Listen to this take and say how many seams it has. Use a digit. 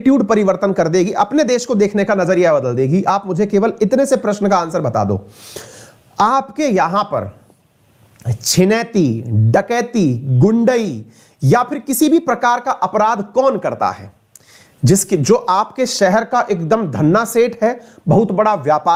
0